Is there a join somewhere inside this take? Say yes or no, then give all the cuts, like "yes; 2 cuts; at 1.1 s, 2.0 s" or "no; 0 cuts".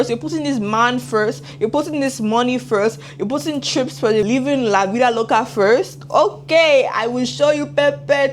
yes; 1 cut; at 4.2 s